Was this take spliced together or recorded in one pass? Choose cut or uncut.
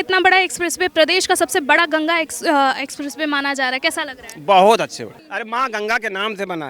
uncut